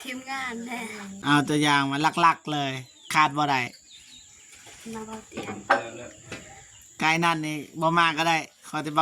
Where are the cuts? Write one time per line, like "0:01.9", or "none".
0:01.2